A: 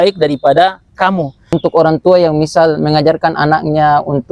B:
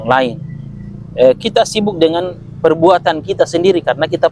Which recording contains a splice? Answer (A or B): A